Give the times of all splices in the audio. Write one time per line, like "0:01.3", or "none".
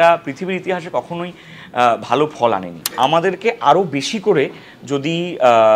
0:02.9

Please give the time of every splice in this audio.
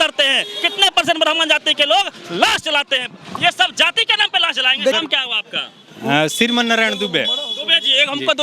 0:04.9

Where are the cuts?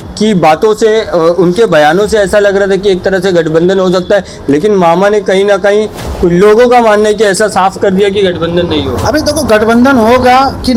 none

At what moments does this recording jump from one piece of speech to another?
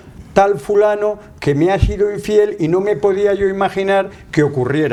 none

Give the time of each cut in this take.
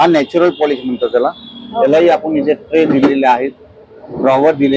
none

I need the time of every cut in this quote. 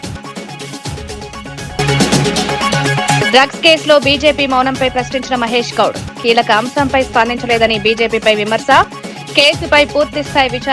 0:01.8
0:03.3

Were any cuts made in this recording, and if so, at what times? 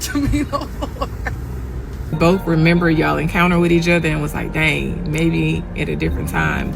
0:02.1

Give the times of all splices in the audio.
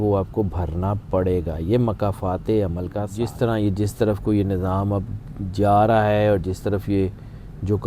0:03.1

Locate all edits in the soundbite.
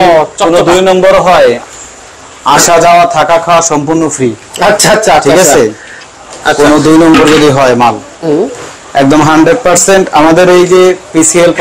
none

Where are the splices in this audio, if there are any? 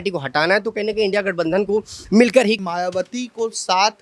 0:02.6

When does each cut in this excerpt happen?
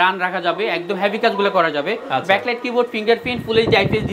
none

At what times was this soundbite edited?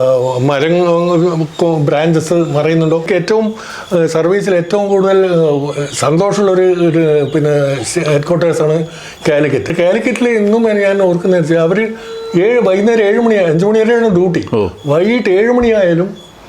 0:03.1
0:09.7

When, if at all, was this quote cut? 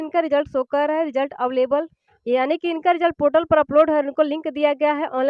none

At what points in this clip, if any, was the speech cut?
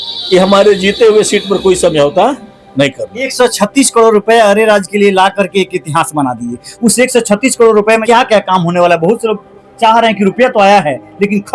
0:03.3
0:08.0

